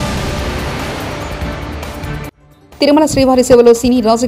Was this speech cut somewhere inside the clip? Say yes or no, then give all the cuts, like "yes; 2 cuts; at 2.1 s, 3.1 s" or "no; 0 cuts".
yes; 1 cut; at 2.4 s